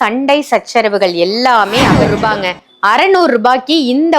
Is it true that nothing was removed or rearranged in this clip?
no; 1 cut; at 2.1 s

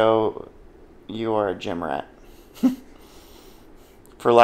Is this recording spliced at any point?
no; 0 cuts

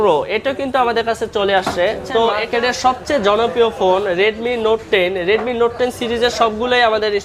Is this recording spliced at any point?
yes; 1 cut; at 2.4 s

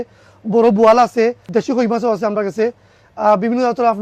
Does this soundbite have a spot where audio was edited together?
yes; 1 cut; at 1.4 s

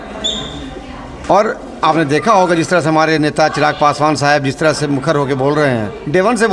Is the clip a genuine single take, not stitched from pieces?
yes; 0 cuts

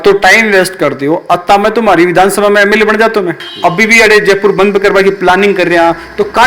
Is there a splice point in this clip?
yes; 1 cut; at 3.4 s

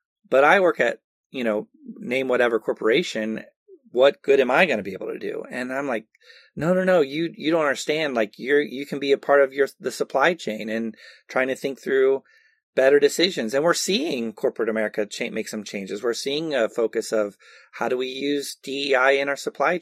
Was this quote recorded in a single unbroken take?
yes; 0 cuts

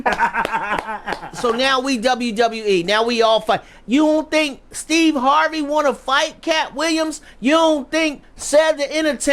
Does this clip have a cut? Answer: yes; 1 cut; at 1.3 s

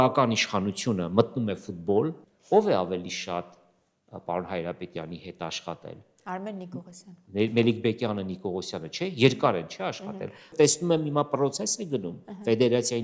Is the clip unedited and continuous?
no; 2 cuts; at 2.3 s, 10.5 s

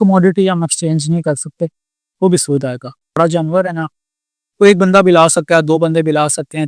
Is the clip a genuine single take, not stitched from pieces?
no; 1 cut; at 3.2 s

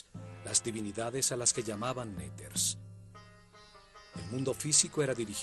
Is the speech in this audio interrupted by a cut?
no; 0 cuts

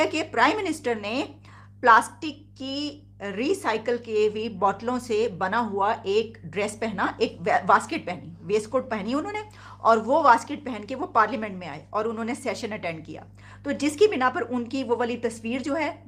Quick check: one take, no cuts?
yes; 0 cuts

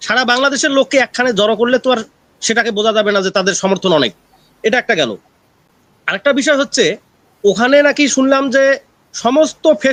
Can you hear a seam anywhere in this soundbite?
no; 0 cuts

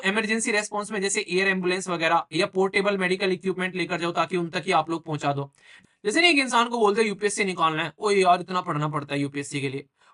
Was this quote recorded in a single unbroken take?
no; 1 cut; at 5.7 s

